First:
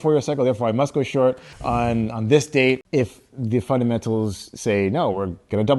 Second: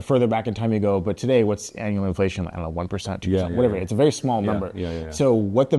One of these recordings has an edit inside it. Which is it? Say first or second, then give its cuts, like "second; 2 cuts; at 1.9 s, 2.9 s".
first; 2 cuts; at 1.5 s, 2.8 s